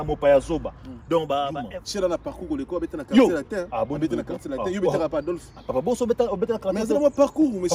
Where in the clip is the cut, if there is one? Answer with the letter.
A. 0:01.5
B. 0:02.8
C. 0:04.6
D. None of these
A